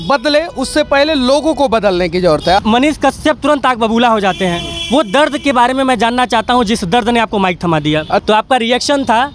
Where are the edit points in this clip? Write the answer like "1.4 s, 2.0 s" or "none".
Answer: 2.6 s, 8.2 s